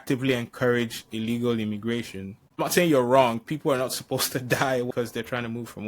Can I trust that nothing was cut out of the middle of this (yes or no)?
no